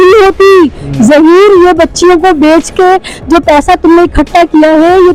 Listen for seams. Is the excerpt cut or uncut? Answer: uncut